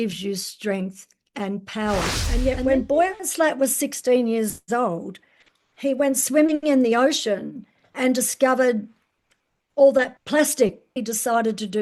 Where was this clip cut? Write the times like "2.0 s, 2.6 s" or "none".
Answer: 2.2 s, 10.9 s